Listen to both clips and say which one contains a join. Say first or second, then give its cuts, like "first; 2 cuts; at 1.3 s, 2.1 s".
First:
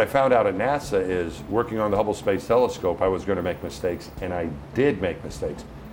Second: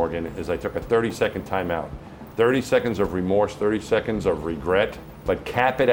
second; 1 cut; at 5.0 s